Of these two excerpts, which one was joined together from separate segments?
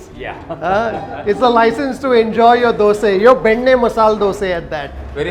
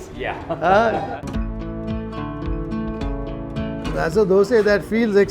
second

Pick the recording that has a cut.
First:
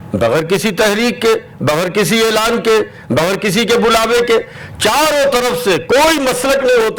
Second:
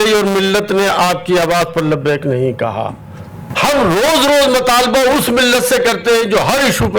second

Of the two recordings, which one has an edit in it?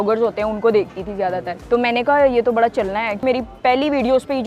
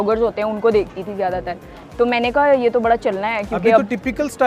first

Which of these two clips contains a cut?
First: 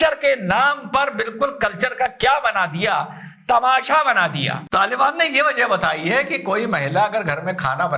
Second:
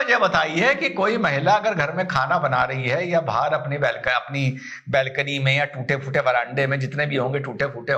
first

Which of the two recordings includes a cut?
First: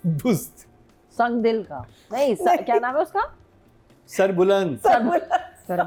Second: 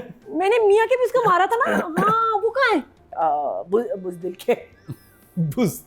second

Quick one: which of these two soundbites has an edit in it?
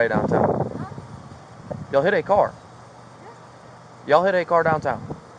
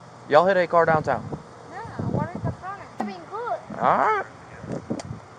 second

